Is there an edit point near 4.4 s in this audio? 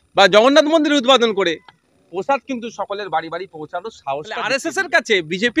yes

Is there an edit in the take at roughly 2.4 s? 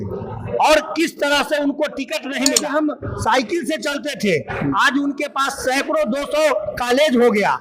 yes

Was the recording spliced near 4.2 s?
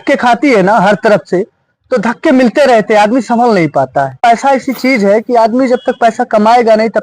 yes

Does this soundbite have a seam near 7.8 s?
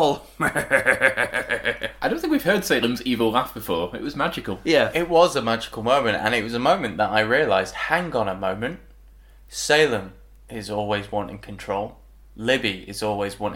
no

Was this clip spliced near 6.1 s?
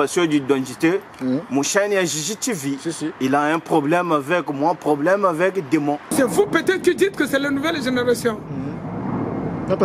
yes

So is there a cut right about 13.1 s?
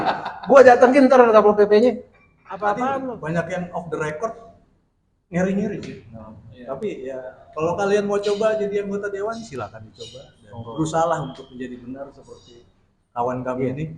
no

